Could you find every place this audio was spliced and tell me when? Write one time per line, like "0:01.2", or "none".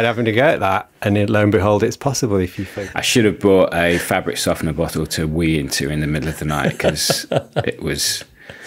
0:02.6